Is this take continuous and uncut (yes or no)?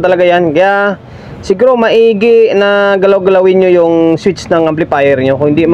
yes